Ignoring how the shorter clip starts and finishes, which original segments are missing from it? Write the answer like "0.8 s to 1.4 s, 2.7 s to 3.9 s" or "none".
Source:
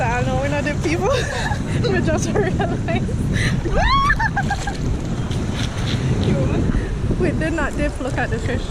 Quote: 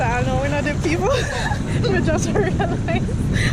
none